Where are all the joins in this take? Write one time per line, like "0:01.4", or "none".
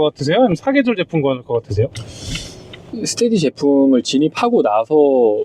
0:02.9